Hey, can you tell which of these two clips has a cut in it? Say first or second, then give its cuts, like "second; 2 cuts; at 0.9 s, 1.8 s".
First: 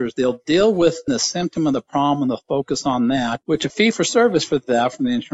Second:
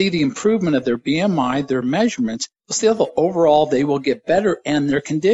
first; 1 cut; at 1.1 s